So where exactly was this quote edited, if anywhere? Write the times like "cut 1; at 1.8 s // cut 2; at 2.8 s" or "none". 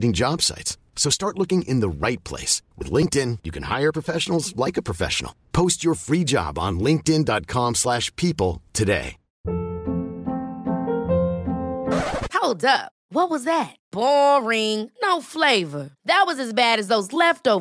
cut 1; at 9.4 s